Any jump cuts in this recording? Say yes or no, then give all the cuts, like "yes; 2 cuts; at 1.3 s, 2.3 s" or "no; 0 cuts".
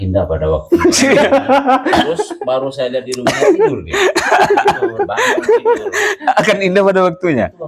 no; 0 cuts